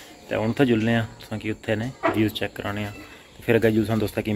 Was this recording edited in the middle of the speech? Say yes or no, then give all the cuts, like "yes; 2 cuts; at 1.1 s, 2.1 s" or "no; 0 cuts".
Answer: no; 0 cuts